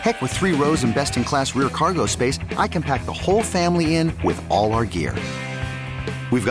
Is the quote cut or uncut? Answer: uncut